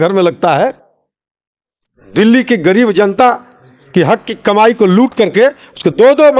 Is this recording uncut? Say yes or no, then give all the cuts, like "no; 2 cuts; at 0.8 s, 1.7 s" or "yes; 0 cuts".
yes; 0 cuts